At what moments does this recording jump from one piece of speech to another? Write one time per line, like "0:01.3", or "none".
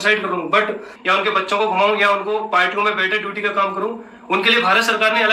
0:00.9